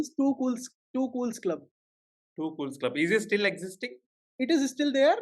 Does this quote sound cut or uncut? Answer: uncut